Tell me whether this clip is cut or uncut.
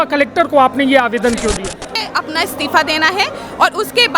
cut